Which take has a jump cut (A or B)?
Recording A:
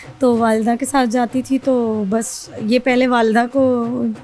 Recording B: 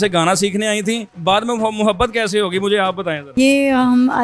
B